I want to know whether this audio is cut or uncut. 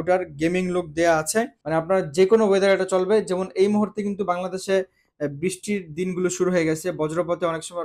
cut